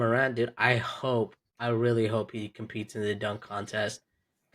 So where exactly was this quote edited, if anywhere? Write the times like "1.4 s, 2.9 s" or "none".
1.5 s